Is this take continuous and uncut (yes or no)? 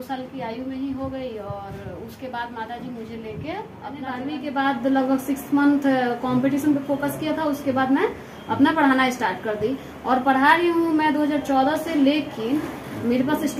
no